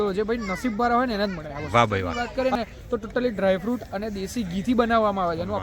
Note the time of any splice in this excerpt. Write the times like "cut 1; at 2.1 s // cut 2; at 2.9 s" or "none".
cut 1; at 2.2 s